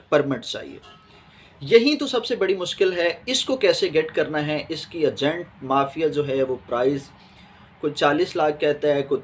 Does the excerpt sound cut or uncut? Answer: uncut